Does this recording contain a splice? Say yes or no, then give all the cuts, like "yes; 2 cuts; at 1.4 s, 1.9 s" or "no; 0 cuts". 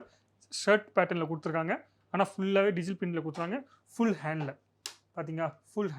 no; 0 cuts